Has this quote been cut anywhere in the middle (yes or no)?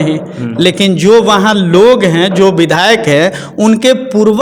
no